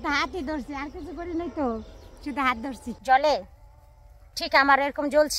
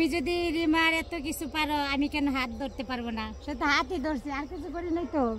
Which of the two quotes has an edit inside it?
first; 1 cut; at 2.9 s

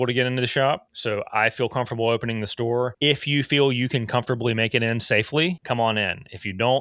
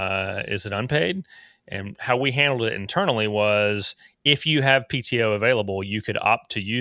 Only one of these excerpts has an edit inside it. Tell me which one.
first; 3 cuts; at 0.9 s, 2.9 s, 5.6 s

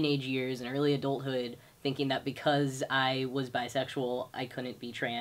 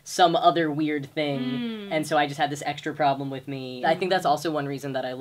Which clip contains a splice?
second; 1 cut; at 3.8 s

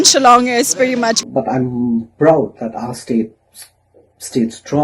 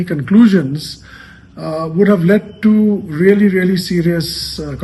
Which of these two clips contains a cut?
first; 1 cut; at 1.3 s

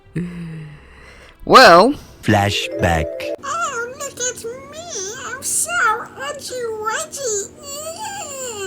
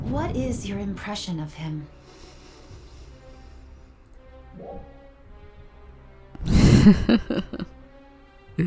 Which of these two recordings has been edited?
first; 1 cut; at 2.1 s

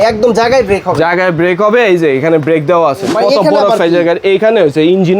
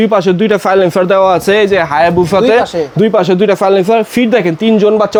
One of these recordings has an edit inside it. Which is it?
first; 1 cut; at 3.1 s

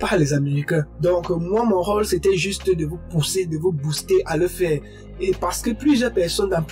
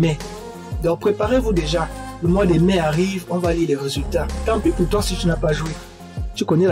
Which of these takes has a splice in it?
first; 1 cut; at 0.9 s

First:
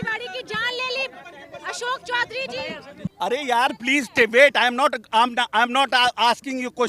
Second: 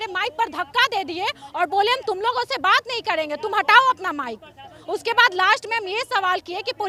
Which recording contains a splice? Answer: first; 1 cut; at 3.1 s

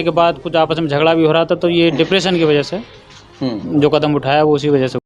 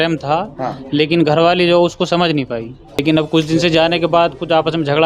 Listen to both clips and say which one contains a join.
second; 1 cut; at 3.0 s

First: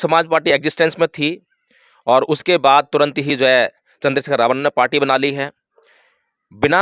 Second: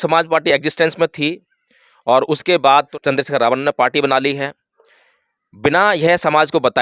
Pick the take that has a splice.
second; 1 cut; at 2.9 s

